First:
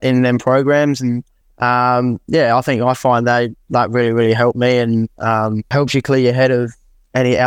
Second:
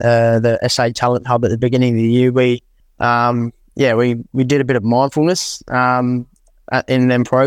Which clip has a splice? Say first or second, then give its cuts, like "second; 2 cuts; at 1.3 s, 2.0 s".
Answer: first; 1 cut; at 5.7 s